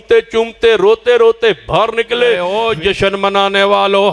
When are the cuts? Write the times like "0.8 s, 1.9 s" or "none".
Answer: 2.5 s